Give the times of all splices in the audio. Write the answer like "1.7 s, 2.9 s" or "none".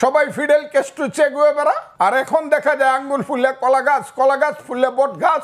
1.9 s